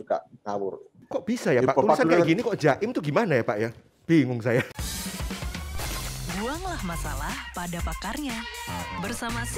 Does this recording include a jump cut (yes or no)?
yes